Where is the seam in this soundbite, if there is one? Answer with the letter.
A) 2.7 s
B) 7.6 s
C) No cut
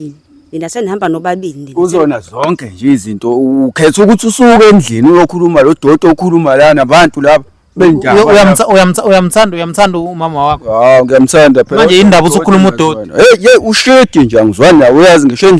C